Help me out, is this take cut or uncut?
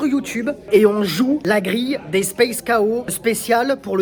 uncut